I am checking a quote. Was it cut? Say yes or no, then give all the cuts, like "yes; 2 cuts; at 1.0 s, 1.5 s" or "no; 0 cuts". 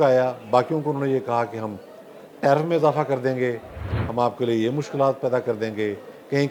no; 0 cuts